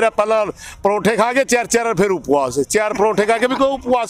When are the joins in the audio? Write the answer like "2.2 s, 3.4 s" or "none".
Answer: none